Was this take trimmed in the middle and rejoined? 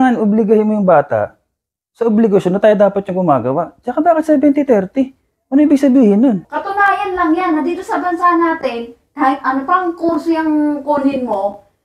yes; 1 cut; at 6.5 s

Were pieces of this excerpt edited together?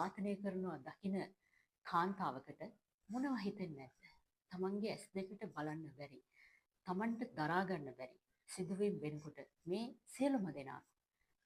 no; 0 cuts

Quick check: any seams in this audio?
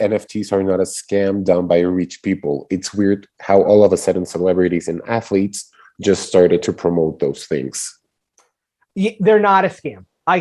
no; 0 cuts

